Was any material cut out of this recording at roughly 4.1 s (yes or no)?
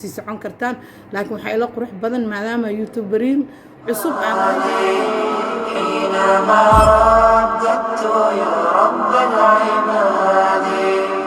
yes